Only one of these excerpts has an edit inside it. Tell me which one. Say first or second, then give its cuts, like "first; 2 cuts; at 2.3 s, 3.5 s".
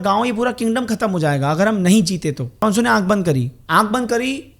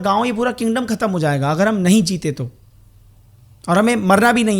first; 2 cuts; at 2.6 s, 3.6 s